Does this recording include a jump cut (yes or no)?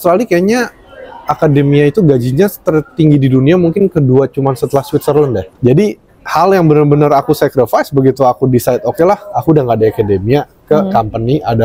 yes